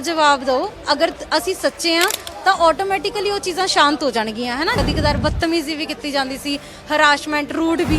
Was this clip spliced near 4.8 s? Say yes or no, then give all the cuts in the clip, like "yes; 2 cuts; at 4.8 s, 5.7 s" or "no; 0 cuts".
yes; 1 cut; at 4.8 s